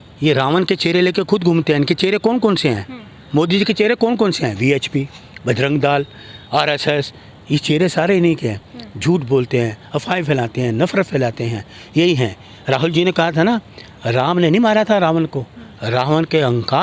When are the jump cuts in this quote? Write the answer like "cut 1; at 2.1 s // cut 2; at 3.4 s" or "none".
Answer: none

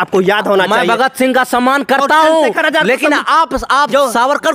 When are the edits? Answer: none

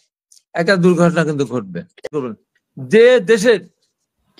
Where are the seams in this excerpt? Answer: cut 1; at 2.1 s

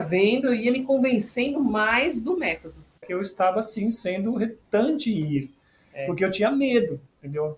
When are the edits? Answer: cut 1; at 3.0 s

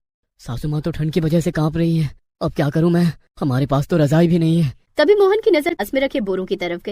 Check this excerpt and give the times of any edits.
cut 1; at 5.8 s

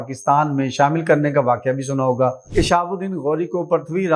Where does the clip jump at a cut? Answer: cut 1; at 2.4 s

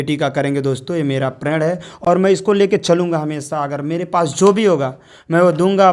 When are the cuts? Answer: none

